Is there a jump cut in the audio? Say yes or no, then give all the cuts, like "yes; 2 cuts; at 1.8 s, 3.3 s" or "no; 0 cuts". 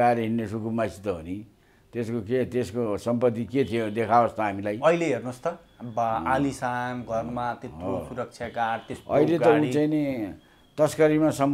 no; 0 cuts